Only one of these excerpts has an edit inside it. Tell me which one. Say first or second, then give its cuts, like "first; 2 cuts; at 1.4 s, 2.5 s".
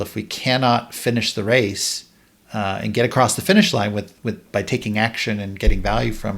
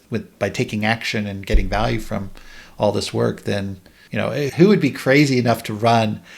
second; 1 cut; at 4.4 s